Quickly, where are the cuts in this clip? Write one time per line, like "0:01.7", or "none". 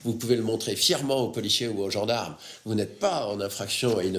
none